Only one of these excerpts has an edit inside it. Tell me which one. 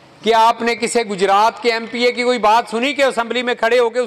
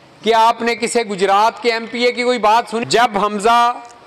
second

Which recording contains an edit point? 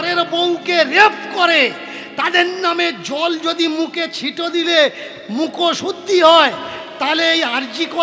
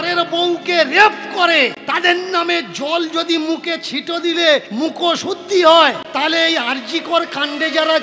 second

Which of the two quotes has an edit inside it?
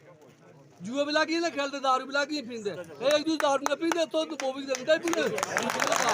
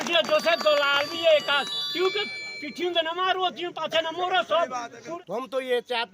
second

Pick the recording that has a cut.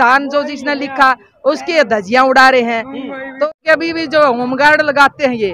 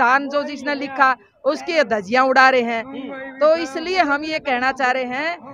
first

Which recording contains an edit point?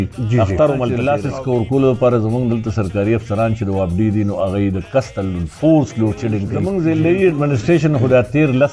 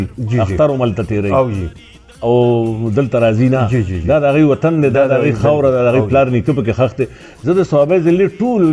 first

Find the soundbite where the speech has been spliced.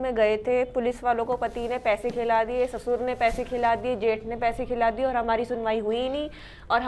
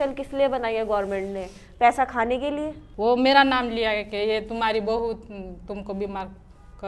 second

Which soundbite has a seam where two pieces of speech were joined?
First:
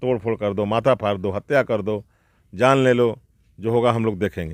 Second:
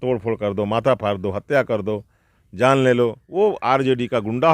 second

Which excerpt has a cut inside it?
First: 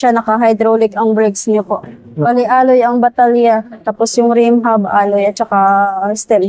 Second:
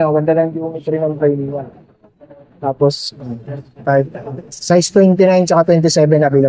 second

